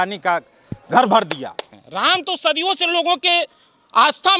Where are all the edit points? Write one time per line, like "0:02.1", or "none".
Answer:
0:01.8